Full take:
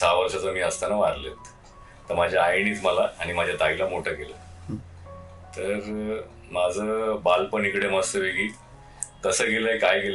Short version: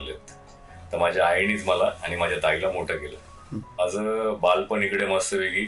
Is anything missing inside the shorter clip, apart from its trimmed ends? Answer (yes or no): yes